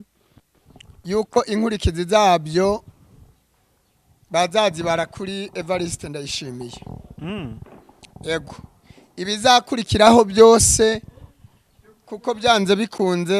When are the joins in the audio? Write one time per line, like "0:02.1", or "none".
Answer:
none

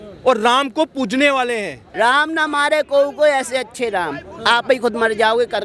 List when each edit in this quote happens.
0:01.8

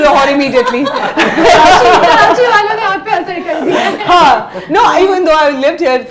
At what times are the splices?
none

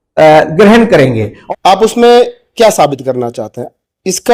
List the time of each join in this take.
0:01.3

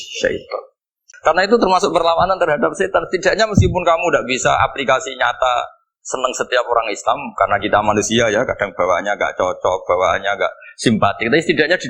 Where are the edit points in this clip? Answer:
0:01.0

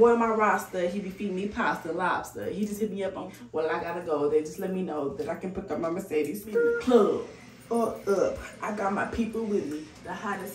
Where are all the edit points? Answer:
0:03.3
0:06.7

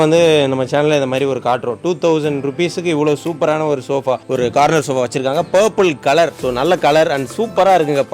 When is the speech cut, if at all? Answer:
0:04.2

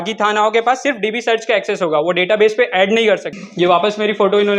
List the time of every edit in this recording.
0:03.4

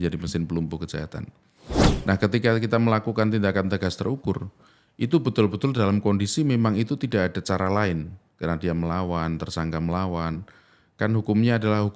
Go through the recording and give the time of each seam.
none

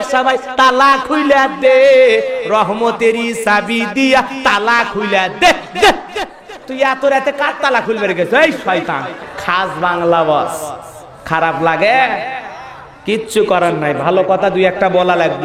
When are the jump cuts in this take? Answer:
0:09.3

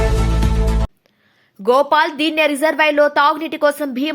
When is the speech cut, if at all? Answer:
0:01.1

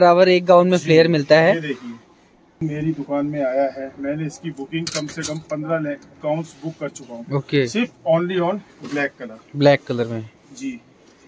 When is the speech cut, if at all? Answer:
0:02.6

